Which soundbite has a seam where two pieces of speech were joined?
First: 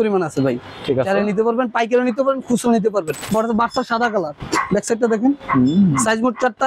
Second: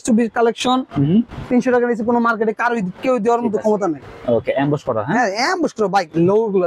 first; 2 cuts; at 3.2 s, 4.4 s

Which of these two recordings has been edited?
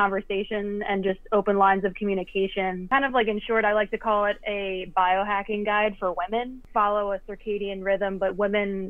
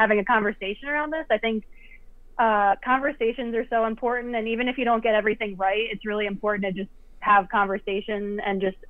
first; 2 cuts; at 2.8 s, 6.6 s

